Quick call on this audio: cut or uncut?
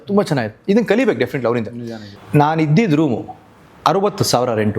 cut